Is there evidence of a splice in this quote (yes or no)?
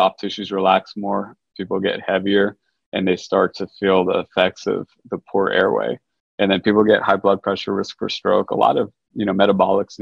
no